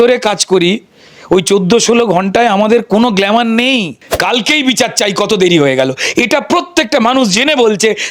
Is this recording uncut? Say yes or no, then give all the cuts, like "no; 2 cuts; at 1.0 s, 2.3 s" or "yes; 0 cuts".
no; 1 cut; at 4.1 s